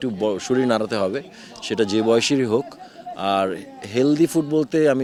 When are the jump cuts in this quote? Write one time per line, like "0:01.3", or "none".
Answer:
none